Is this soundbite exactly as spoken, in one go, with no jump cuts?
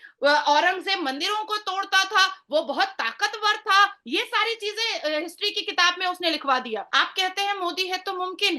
no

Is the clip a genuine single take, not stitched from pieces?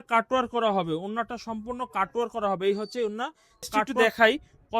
no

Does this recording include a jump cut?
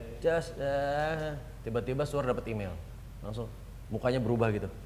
no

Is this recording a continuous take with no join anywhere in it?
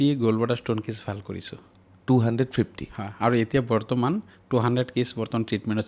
yes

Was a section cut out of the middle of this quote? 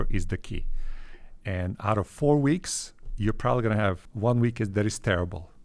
yes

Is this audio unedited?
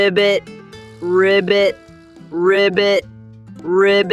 yes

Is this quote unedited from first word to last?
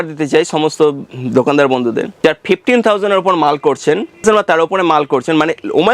no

